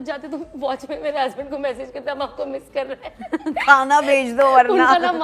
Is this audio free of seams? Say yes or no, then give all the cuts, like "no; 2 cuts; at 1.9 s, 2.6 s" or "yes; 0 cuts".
yes; 0 cuts